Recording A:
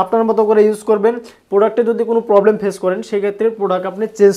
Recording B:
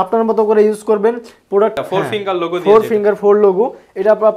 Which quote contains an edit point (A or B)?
B